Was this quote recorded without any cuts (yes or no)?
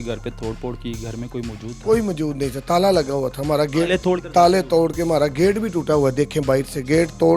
no